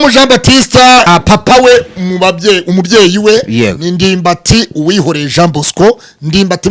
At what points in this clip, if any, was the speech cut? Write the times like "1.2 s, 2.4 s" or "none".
1.1 s